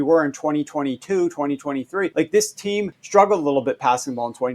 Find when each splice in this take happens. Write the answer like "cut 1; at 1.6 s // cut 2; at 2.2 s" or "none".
cut 1; at 2.1 s // cut 2; at 3.0 s